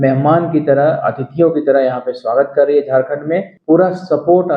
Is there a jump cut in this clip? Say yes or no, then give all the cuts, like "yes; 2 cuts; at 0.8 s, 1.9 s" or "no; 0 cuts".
yes; 1 cut; at 3.5 s